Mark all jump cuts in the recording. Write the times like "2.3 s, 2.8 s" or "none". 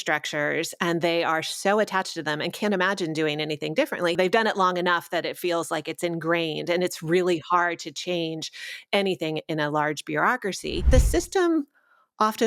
4.1 s, 10.8 s